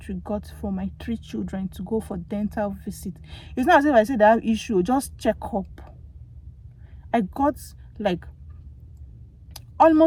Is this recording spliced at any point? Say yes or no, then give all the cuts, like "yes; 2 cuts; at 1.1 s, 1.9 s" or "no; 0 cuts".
no; 0 cuts